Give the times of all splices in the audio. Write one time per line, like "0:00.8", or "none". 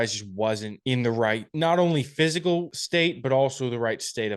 0:01.0
0:02.8